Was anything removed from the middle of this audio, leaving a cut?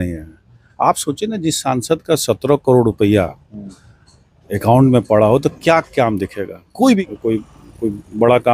yes; 1 cut; at 7.0 s

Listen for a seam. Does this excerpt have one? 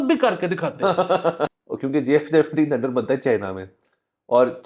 yes; 1 cut; at 1.5 s

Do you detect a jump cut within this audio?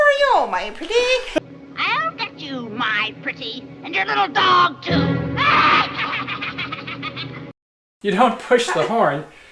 yes; 1 cut; at 7.7 s

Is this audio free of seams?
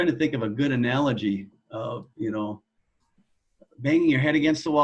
yes; 0 cuts

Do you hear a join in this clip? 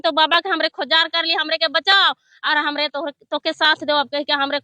no; 0 cuts

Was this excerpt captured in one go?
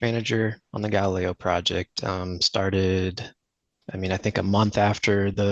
yes; 0 cuts

